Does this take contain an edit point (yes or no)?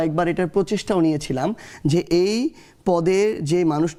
no